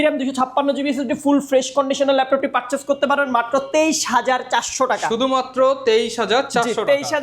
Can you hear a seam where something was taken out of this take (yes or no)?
no